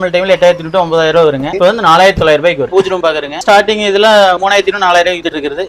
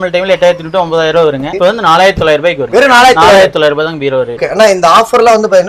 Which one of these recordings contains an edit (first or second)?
first